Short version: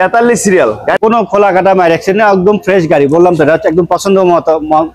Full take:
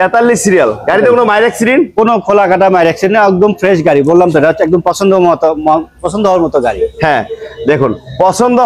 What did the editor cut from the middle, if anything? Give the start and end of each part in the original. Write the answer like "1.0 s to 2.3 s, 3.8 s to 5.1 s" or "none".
1.0 s to 1.9 s